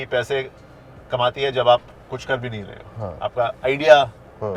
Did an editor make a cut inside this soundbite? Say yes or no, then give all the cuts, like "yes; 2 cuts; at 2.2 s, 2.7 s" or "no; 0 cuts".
no; 0 cuts